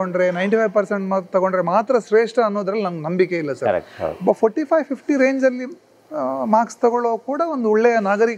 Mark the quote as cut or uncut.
uncut